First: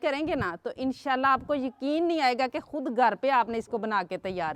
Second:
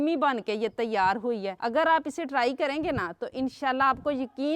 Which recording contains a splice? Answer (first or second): second